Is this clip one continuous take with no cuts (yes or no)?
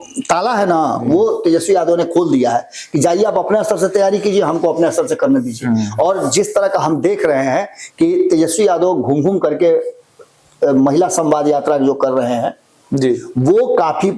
yes